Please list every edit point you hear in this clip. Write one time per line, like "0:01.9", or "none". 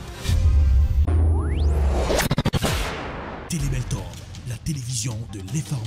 0:02.1